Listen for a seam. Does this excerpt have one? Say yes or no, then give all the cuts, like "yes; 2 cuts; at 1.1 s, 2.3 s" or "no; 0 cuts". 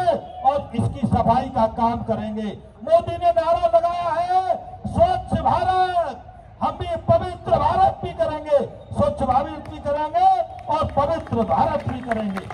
no; 0 cuts